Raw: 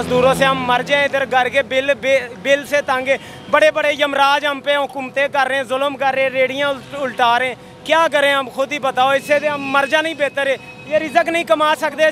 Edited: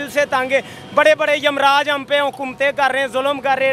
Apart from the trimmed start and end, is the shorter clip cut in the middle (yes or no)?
no